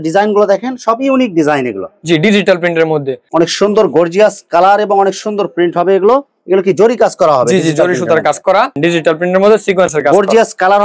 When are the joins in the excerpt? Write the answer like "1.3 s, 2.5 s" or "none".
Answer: 3.2 s, 8.8 s